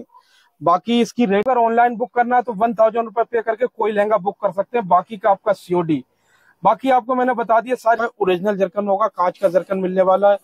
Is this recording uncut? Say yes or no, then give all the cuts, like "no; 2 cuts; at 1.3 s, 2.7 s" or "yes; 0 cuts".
no; 2 cuts; at 1.5 s, 8.3 s